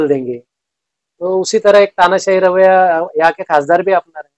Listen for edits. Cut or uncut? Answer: uncut